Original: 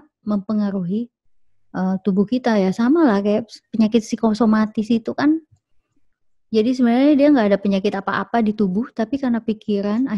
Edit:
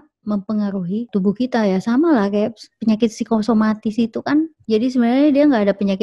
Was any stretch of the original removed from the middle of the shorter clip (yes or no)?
yes